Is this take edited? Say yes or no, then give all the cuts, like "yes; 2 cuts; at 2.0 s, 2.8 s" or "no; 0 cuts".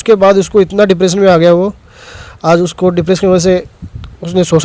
no; 0 cuts